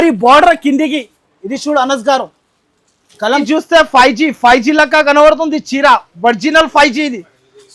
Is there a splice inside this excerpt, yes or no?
yes